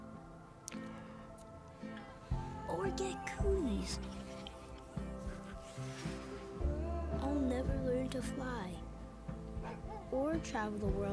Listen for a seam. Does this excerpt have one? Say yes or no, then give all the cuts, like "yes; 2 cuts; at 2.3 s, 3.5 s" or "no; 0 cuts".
no; 0 cuts